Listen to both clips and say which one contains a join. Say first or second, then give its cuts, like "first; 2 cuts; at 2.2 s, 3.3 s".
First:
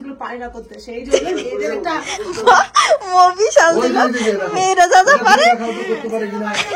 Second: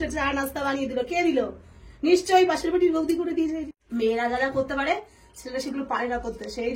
second; 1 cut; at 3.7 s